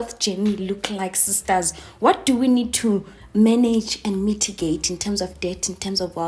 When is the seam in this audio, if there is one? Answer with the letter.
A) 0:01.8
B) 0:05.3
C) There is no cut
C